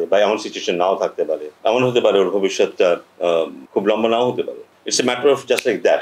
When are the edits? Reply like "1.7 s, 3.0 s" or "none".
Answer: 1.5 s, 3.6 s, 4.7 s